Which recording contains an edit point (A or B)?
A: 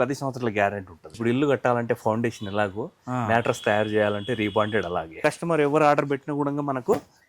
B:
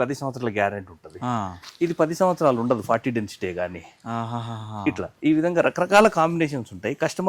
A